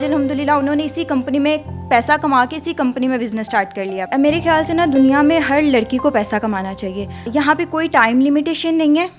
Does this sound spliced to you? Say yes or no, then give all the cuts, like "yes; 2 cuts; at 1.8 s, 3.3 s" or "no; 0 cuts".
yes; 2 cuts; at 4.1 s, 7.3 s